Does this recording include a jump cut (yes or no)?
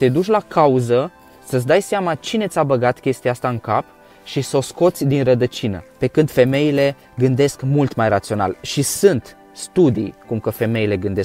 yes